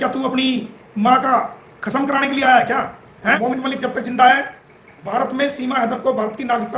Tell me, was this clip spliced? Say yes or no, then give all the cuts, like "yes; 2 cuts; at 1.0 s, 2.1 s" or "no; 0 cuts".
yes; 1 cut; at 3.4 s